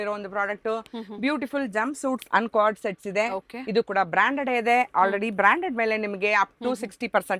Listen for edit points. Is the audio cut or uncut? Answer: uncut